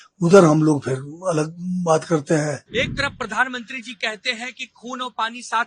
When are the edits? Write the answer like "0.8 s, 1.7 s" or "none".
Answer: 2.6 s